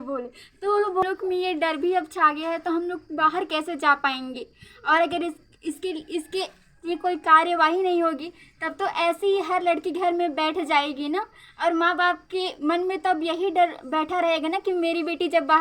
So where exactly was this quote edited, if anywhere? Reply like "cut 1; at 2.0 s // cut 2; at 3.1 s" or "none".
cut 1; at 1.0 s